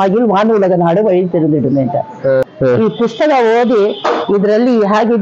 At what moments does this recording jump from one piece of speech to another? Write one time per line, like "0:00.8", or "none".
0:02.5